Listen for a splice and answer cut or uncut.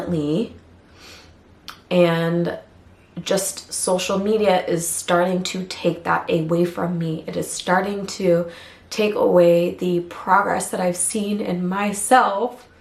uncut